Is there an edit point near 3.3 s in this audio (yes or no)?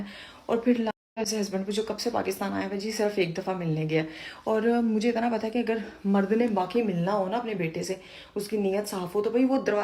no